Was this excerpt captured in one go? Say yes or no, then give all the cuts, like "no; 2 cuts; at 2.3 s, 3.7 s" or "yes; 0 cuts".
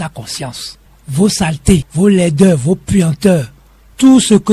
no; 1 cut; at 1.9 s